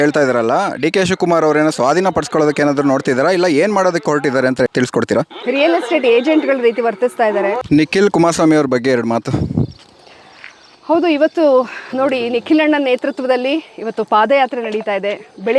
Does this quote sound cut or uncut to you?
cut